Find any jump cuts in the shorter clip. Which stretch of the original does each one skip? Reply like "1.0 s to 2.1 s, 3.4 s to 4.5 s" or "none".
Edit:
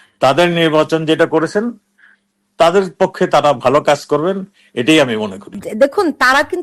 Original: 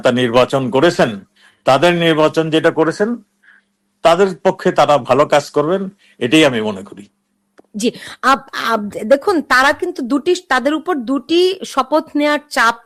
7.1 s to 8.9 s

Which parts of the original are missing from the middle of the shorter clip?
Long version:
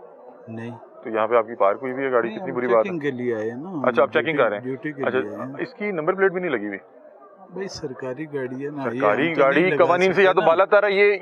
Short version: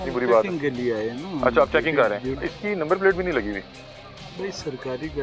4.8 s to 5.5 s

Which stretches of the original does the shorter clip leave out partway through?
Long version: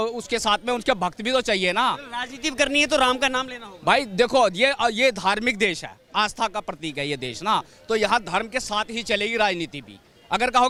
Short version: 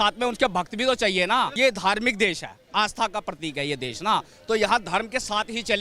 2.0 s to 5.0 s

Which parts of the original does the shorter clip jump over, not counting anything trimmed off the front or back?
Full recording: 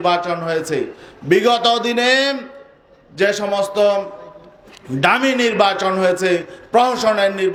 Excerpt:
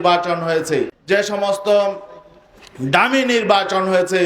1.0 s to 3.1 s

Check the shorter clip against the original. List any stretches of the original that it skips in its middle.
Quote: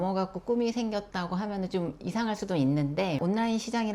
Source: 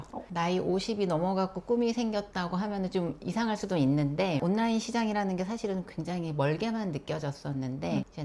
none

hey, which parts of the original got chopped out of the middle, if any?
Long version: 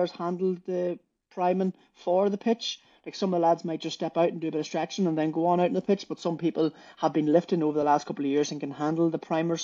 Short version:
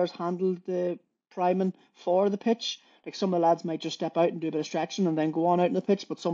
none

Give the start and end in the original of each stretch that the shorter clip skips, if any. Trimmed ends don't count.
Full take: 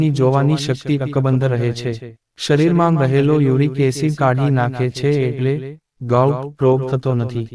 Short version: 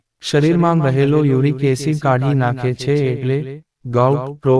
none

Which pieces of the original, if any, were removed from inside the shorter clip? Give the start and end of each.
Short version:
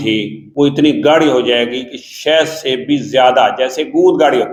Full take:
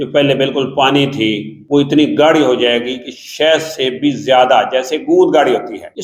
none

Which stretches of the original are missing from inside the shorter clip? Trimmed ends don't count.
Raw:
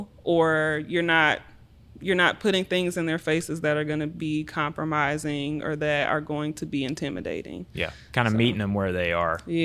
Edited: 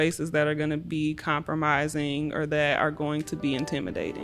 none

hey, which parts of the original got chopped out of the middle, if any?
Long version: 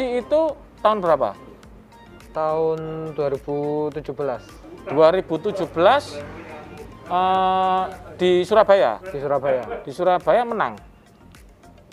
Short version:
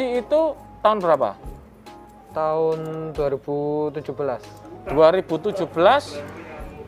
none

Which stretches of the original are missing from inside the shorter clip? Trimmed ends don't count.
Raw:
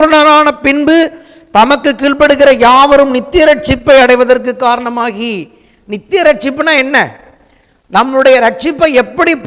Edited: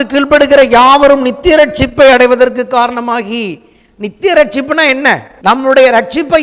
7.2 s to 7.8 s

